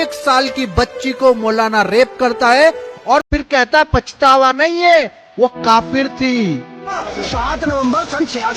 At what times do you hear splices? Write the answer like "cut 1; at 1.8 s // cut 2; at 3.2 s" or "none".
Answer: cut 1; at 7.0 s